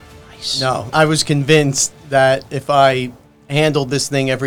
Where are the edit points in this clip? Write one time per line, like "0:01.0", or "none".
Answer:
0:00.9